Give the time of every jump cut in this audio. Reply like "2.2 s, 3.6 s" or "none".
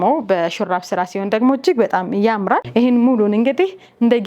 2.7 s